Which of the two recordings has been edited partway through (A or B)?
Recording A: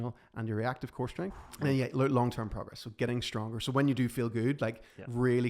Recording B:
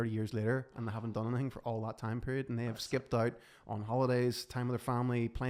A